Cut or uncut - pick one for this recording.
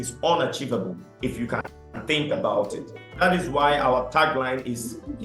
cut